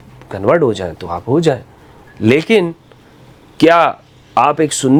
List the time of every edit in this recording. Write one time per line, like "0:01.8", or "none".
none